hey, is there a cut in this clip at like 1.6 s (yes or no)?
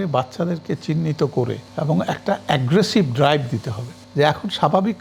yes